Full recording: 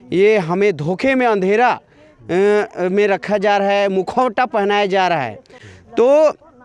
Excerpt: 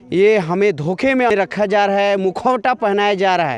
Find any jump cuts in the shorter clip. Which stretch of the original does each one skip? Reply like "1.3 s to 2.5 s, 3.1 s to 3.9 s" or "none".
1.0 s to 2.7 s